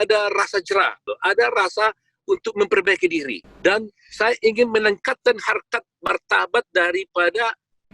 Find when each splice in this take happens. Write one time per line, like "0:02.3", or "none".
0:01.1
0:03.4